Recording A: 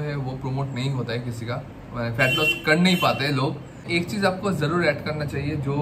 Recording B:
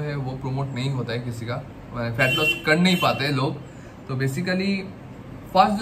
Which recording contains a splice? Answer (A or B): A